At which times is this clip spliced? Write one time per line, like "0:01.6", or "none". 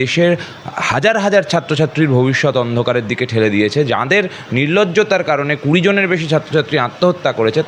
none